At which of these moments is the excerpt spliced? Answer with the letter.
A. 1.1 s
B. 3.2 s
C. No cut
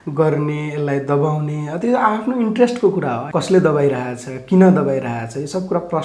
B